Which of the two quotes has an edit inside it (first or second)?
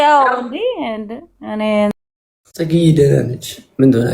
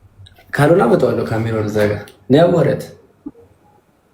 first